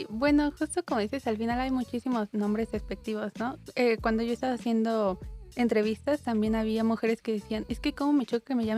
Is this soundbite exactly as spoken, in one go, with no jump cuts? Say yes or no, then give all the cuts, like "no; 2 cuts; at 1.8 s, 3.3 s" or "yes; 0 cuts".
yes; 0 cuts